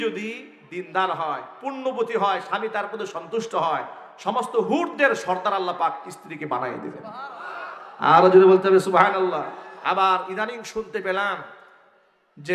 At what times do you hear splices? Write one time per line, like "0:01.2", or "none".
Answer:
0:09.7